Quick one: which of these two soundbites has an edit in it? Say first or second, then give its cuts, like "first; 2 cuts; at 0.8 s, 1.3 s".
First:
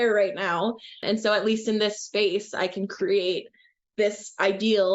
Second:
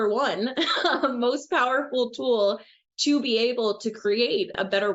first; 1 cut; at 1.0 s